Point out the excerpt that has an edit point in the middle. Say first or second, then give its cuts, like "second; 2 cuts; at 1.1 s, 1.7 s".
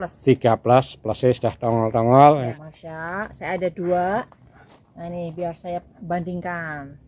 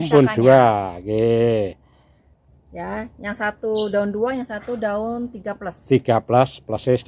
first; 1 cut; at 2.5 s